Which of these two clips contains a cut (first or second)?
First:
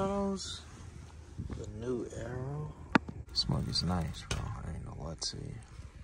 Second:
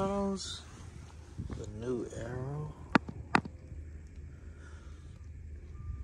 first